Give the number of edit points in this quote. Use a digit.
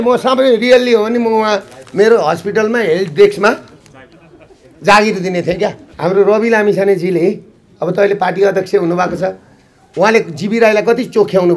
1